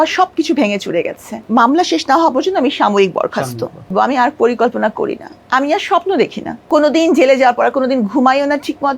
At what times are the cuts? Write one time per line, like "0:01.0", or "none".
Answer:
0:01.4
0:03.9
0:06.5